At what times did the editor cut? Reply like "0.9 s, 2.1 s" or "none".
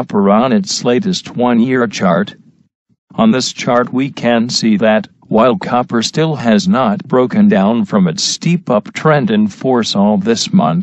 7.9 s